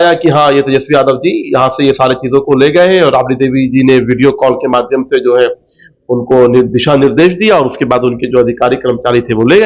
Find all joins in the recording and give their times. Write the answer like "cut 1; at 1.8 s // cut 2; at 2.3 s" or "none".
none